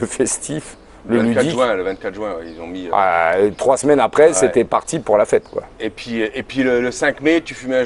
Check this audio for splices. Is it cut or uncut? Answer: uncut